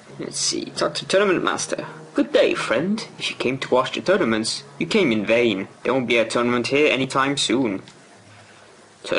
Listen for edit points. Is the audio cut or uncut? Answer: cut